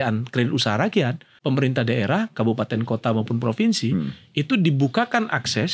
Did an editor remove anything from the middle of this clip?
yes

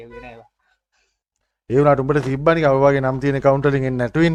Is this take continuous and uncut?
yes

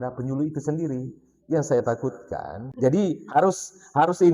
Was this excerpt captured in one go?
no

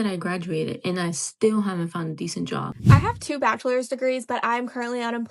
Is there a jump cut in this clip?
yes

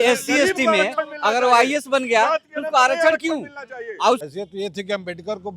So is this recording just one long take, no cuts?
no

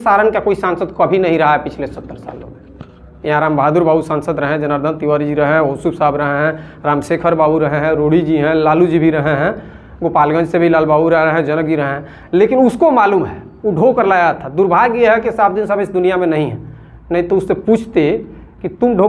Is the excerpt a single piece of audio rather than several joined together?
yes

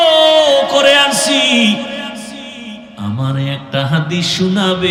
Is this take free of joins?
yes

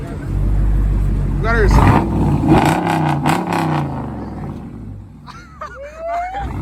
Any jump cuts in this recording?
no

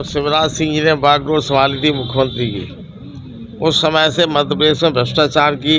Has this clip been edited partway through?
no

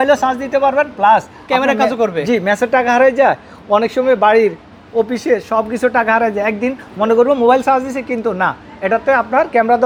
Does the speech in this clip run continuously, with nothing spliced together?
yes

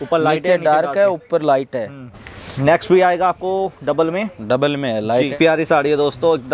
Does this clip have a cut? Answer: yes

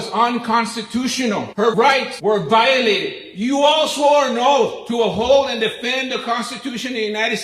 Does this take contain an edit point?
yes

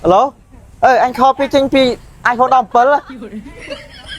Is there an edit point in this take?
no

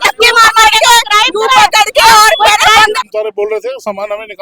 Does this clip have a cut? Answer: yes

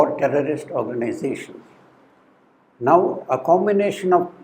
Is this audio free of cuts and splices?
yes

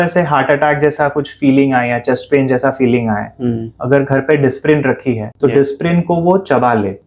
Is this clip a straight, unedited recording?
yes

